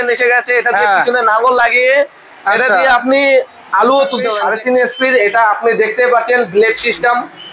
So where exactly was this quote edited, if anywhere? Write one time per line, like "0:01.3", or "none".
0:04.4